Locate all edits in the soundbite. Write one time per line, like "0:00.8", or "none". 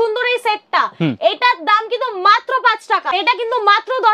0:03.1